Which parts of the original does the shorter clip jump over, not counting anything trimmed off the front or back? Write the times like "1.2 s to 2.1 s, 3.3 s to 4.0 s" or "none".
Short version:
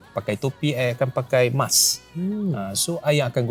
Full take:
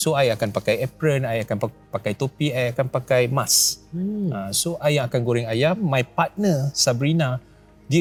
none